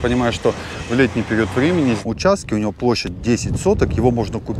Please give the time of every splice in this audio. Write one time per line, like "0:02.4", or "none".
0:02.0